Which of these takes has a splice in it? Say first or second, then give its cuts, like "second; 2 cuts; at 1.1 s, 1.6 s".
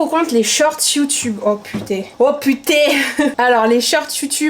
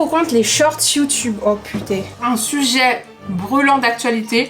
second; 1 cut; at 2.1 s